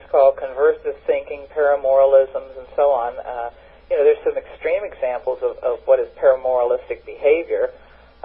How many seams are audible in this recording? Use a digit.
0